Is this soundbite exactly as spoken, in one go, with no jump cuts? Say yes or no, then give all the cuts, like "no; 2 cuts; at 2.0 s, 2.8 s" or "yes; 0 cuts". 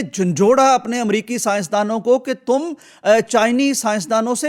yes; 0 cuts